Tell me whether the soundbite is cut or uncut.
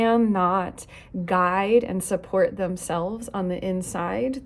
uncut